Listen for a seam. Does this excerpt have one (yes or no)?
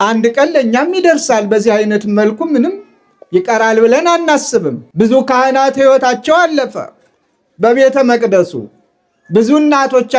no